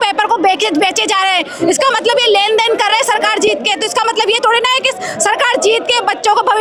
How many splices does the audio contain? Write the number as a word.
zero